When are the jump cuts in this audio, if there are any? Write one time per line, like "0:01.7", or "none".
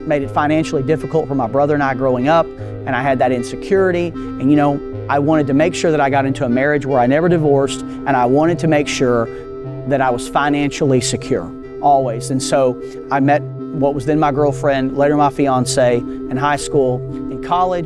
none